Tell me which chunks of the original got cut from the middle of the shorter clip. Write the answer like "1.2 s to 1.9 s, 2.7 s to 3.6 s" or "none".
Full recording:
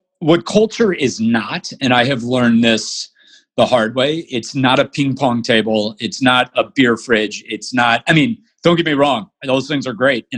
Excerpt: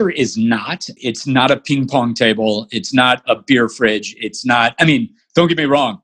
1.8 s to 4.2 s